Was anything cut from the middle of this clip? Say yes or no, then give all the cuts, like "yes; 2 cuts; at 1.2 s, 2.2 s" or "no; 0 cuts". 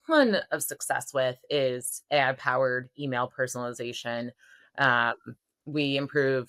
no; 0 cuts